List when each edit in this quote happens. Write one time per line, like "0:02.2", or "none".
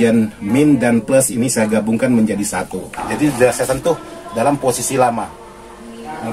0:03.0